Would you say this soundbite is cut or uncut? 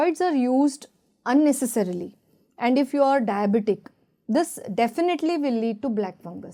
uncut